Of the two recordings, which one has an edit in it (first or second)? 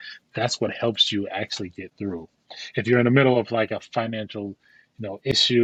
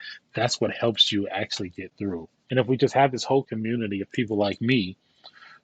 second